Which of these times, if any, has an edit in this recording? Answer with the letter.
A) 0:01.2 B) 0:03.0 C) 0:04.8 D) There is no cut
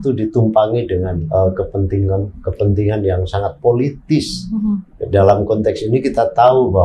A